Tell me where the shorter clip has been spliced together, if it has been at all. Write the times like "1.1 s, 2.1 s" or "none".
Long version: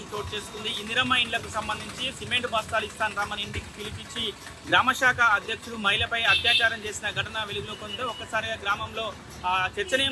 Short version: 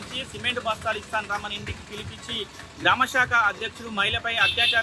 none